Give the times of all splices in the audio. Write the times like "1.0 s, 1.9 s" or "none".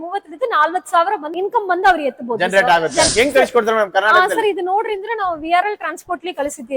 1.3 s, 3.1 s